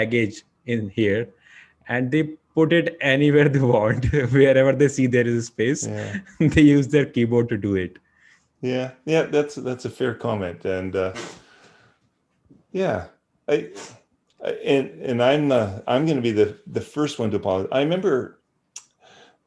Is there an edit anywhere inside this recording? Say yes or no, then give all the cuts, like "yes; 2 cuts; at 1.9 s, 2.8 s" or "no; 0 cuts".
no; 0 cuts